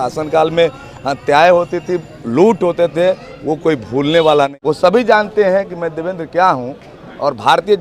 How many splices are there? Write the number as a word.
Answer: one